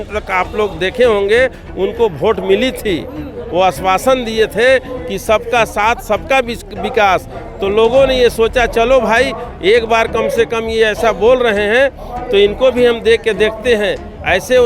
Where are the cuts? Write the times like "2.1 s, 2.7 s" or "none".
none